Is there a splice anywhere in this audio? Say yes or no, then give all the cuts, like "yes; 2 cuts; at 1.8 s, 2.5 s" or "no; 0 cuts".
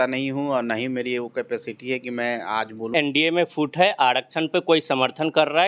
yes; 1 cut; at 2.9 s